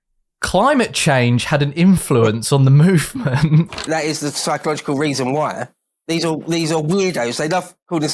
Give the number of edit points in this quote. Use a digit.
1